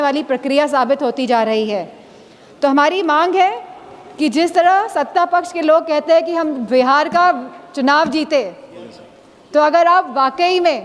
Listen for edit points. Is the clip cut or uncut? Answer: uncut